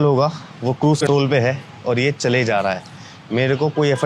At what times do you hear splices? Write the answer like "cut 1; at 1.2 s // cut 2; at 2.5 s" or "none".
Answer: cut 1; at 1.0 s